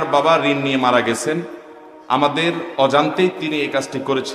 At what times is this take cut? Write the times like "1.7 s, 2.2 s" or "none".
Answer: none